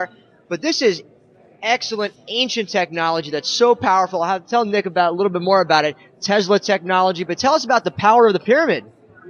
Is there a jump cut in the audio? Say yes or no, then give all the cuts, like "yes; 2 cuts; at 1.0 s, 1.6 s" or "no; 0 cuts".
no; 0 cuts